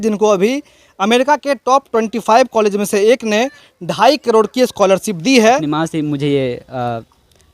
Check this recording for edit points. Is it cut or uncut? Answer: cut